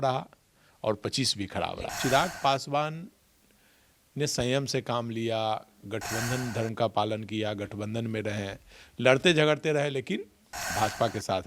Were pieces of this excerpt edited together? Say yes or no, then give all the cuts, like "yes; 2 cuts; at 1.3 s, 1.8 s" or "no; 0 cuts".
yes; 1 cut; at 1.9 s